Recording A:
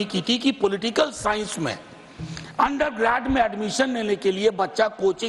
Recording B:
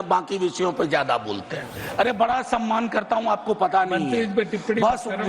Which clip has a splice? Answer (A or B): B